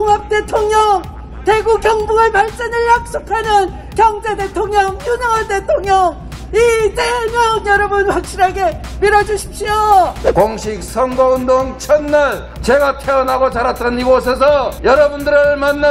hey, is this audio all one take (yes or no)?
no